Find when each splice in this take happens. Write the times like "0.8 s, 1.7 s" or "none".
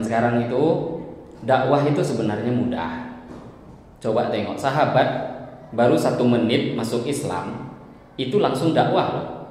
none